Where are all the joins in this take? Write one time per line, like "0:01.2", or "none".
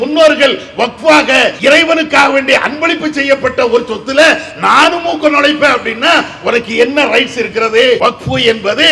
0:01.6
0:08.0